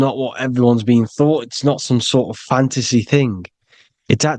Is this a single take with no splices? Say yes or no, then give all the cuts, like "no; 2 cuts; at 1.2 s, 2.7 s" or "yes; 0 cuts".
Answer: yes; 0 cuts